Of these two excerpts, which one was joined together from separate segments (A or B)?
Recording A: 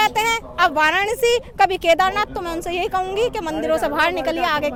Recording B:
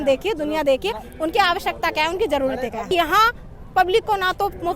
B